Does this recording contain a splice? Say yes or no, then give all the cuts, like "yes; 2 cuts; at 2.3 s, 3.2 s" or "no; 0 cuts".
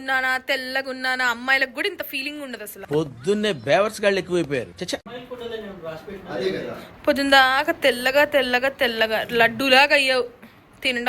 no; 0 cuts